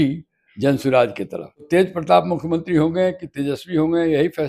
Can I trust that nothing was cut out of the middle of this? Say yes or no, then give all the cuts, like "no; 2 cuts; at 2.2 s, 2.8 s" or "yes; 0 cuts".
no; 1 cut; at 1.7 s